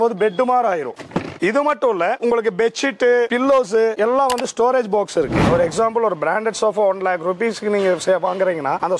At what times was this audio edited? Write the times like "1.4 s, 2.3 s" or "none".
1.3 s, 2.2 s, 5.4 s